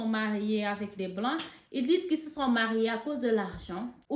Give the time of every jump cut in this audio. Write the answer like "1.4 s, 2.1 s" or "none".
none